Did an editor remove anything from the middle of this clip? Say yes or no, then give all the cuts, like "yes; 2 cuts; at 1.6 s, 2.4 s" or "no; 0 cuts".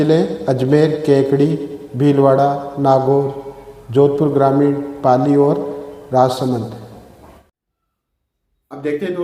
yes; 1 cut; at 7.4 s